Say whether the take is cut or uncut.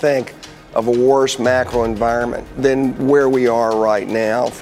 cut